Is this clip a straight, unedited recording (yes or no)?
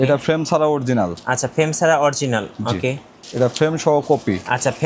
no